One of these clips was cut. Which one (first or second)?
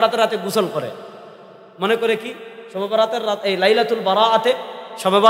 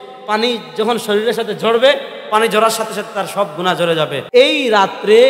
second